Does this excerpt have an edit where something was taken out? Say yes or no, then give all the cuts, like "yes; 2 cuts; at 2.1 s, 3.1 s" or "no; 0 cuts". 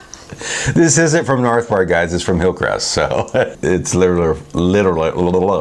yes; 1 cut; at 3.6 s